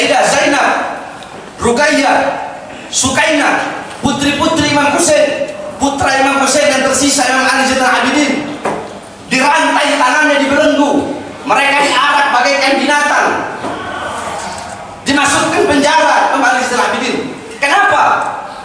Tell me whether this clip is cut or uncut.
uncut